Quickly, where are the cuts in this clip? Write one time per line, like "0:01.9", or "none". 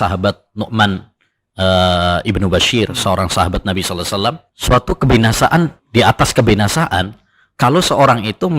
0:04.5
0:05.8